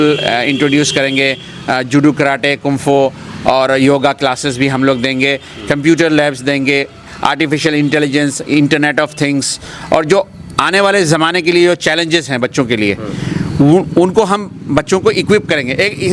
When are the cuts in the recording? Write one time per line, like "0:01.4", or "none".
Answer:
none